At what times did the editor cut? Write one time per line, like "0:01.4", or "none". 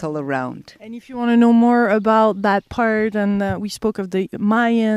0:02.8